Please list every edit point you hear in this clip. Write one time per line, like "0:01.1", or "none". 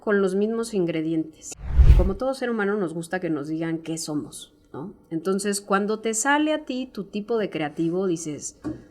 0:01.9